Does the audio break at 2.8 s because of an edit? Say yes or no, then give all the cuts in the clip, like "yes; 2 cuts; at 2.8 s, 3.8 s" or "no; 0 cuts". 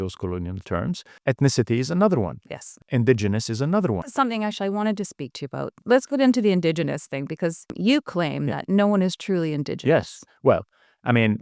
yes; 5 cuts; at 1.1 s, 2.8 s, 4.1 s, 5.8 s, 7.7 s